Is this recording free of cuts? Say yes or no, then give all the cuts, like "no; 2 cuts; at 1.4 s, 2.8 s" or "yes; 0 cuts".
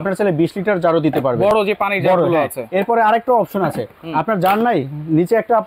yes; 0 cuts